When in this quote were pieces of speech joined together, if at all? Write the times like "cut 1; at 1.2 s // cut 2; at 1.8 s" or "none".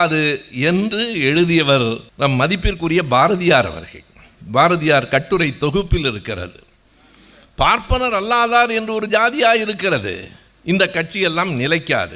cut 1; at 2.1 s